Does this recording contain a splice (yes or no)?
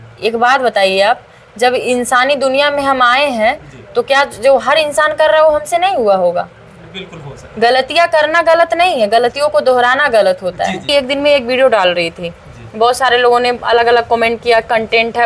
yes